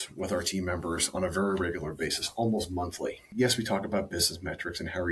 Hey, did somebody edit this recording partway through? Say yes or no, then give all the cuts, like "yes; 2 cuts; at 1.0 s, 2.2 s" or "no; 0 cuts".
yes; 1 cut; at 3.3 s